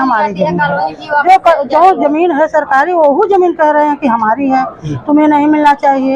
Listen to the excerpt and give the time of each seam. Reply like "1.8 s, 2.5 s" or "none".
none